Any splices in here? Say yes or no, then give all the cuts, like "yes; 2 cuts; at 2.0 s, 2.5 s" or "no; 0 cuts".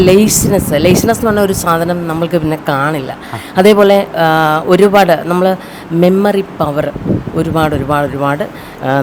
no; 0 cuts